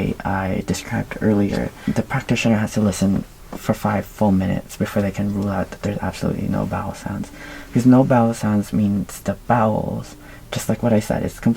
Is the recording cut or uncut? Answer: cut